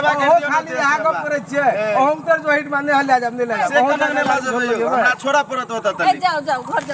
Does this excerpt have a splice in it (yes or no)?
no